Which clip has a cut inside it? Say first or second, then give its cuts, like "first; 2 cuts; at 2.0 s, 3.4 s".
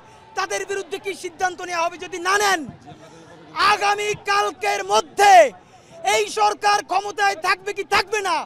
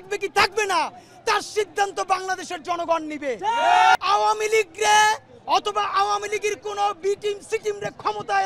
second; 1 cut; at 4.0 s